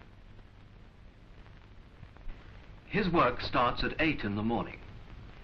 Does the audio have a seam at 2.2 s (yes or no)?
yes